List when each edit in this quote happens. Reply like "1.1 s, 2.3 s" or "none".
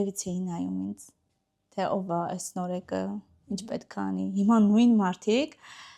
none